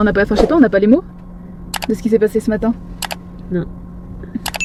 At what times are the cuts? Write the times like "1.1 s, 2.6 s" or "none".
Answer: none